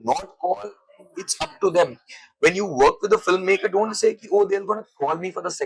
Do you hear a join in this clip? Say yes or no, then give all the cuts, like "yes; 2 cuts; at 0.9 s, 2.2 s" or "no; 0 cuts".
no; 0 cuts